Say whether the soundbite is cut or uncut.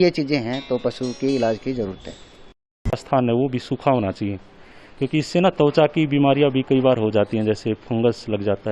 cut